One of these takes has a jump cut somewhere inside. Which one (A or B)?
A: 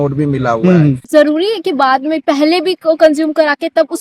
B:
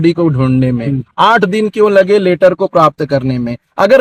A